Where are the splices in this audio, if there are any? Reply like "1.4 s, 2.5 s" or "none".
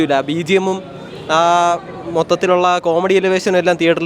none

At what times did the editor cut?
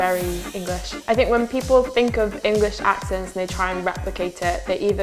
1.0 s

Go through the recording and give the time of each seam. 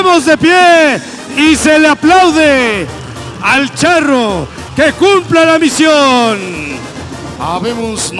7.0 s

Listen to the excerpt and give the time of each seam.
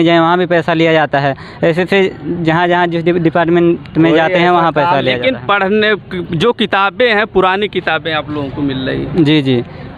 none

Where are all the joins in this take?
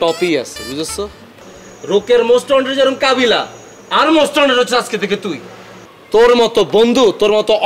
none

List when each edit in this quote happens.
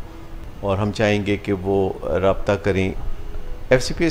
3.1 s

